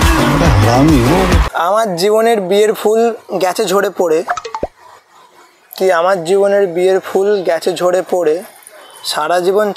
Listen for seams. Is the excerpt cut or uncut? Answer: cut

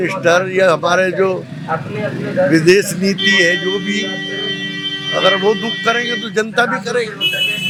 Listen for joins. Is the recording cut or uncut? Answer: uncut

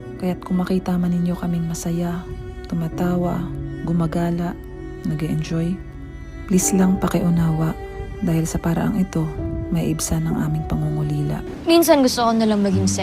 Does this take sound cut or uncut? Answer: cut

